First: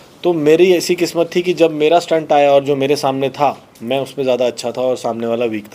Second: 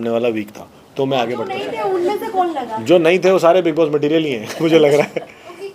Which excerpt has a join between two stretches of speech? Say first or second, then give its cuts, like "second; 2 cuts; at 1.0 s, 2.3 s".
second; 1 cut; at 1.6 s